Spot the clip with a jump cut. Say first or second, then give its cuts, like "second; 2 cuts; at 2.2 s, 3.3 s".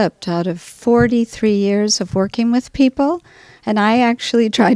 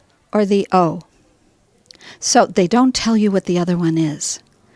first; 1 cut; at 1.8 s